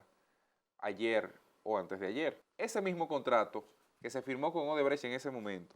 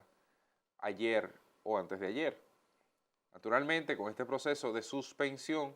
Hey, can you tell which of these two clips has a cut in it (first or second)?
first